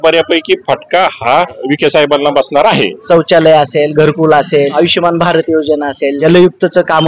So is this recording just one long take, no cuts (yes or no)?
no